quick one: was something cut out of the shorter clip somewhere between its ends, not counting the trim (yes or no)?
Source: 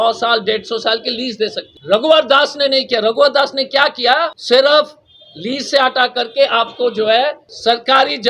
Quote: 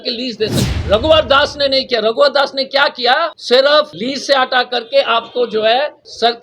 yes